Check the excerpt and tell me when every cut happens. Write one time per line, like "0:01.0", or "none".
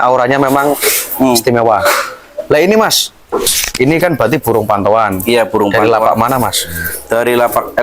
0:03.5